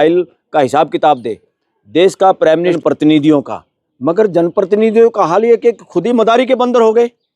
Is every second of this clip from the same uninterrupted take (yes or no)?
no